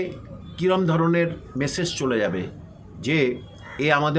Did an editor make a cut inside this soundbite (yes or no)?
no